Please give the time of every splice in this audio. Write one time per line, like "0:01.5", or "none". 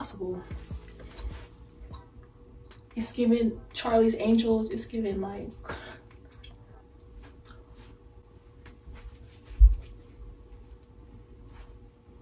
0:01.0